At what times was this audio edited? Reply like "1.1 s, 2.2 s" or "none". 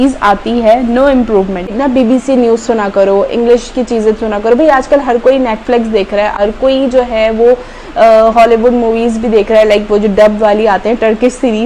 1.7 s